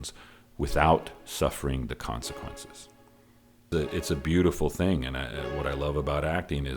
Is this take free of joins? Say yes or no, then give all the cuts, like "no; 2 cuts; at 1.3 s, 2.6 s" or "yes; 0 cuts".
no; 1 cut; at 3.6 s